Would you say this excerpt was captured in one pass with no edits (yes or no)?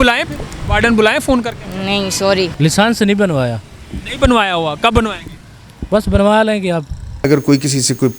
no